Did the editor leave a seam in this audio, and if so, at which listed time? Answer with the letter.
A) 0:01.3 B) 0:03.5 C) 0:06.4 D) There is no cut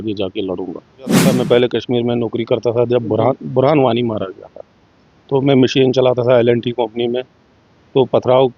A